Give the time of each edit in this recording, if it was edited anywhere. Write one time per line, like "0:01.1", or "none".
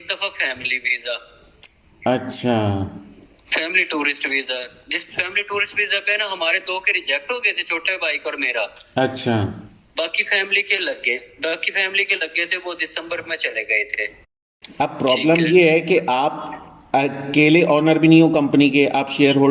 0:14.4

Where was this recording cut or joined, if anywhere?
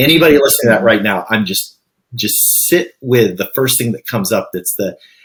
none

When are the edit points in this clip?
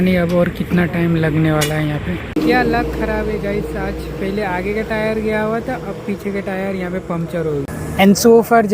0:02.2
0:07.8

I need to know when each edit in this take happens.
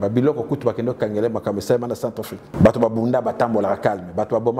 0:02.4

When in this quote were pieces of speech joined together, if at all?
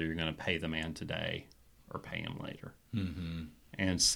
none

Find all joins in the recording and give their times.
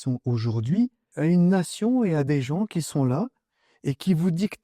0:01.1

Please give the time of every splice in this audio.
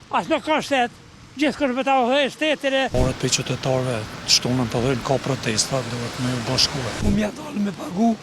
0:02.9
0:07.0

